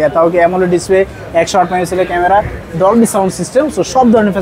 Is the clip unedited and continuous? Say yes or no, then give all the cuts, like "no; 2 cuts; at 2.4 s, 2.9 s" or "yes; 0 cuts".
yes; 0 cuts